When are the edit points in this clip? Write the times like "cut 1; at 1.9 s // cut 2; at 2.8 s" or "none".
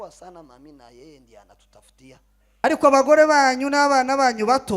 cut 1; at 2.6 s

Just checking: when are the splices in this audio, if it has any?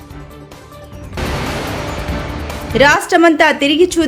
cut 1; at 1.1 s // cut 2; at 2.7 s

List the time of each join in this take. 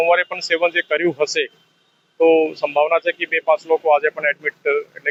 none

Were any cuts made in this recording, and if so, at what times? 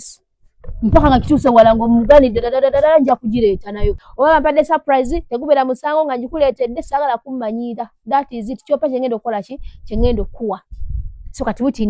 cut 1; at 4.0 s

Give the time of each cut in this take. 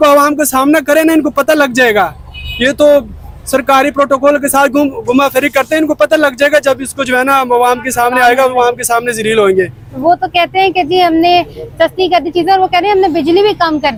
none

